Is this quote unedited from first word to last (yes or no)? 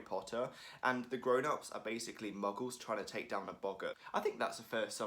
no